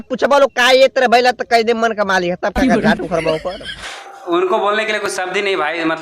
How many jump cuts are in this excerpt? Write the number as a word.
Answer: one